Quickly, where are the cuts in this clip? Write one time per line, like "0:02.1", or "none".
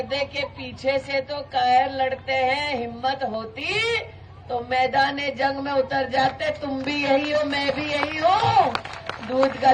none